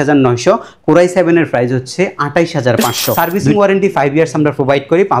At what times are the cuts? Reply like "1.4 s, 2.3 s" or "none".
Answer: 3.2 s